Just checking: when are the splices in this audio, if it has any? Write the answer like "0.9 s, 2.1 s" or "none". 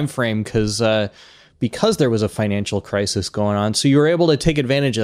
none